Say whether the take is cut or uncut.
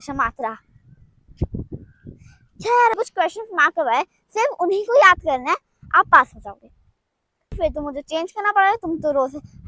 cut